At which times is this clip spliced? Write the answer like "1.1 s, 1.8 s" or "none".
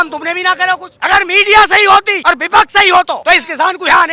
0.9 s, 2.1 s, 3.2 s